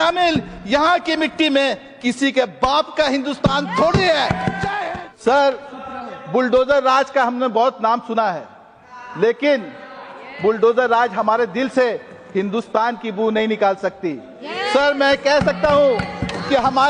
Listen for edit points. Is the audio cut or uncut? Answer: cut